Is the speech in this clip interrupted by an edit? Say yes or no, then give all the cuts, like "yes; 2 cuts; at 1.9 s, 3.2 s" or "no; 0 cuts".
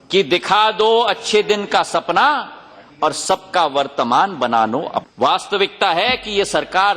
yes; 1 cut; at 5.1 s